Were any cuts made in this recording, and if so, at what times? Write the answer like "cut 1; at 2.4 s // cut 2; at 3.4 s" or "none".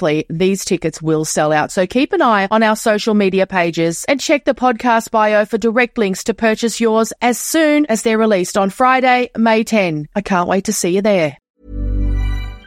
cut 1; at 11.5 s